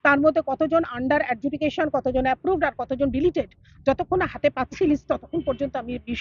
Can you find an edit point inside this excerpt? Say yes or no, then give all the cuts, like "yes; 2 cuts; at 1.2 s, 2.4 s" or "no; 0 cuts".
no; 0 cuts